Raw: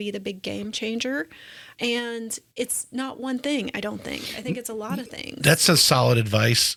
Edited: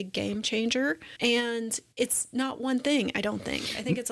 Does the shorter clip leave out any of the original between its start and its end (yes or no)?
yes